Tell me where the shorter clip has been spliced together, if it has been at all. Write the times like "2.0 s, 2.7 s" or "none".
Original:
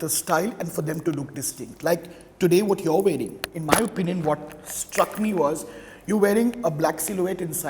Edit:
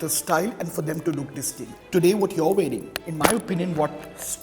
1.7 s